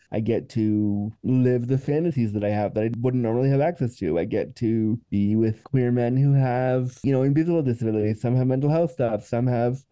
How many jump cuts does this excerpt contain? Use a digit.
2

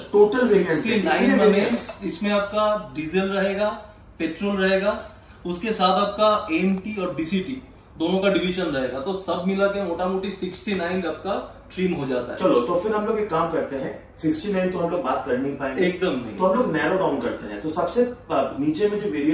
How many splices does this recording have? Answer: 0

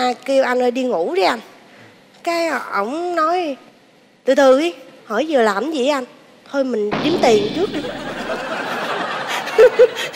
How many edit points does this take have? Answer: 0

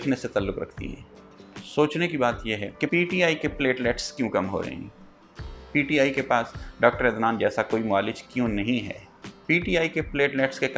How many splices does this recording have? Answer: 0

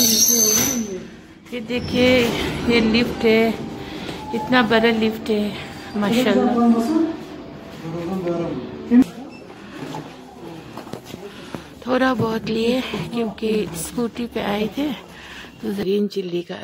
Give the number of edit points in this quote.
2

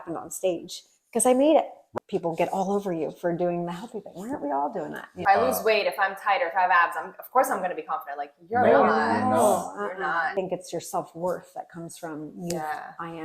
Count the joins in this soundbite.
3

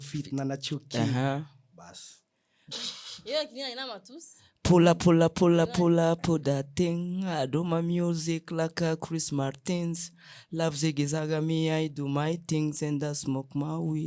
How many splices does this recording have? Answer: 0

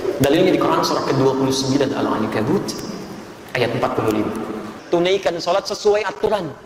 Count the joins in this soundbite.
1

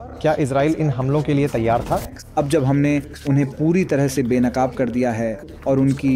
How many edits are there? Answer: 1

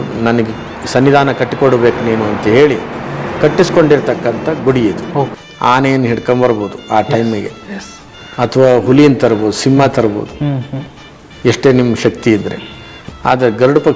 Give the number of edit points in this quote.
1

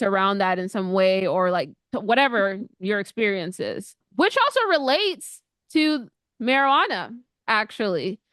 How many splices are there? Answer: 1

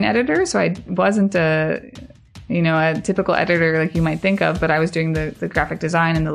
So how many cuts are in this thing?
0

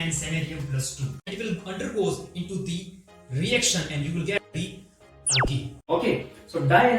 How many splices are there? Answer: 2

